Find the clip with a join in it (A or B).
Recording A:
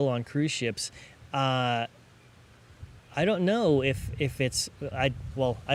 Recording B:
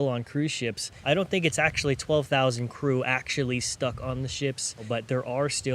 B